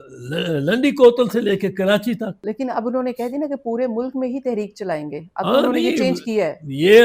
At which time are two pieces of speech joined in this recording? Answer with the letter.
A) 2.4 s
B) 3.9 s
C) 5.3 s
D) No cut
A